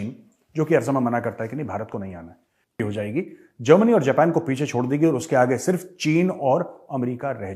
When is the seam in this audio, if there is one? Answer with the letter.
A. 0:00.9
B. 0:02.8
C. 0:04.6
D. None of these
B